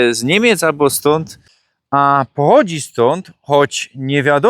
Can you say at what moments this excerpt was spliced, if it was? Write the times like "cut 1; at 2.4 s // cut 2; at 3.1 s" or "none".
cut 1; at 1.4 s